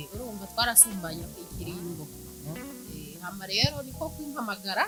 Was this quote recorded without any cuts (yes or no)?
yes